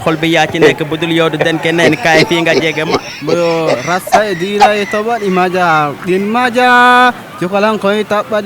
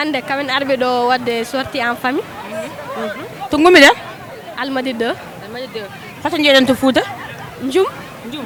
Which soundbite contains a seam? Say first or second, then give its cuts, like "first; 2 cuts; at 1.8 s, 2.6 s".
first; 1 cut; at 3.0 s